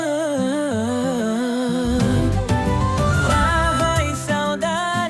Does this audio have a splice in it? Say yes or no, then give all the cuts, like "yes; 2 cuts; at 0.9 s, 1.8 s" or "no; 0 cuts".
no; 0 cuts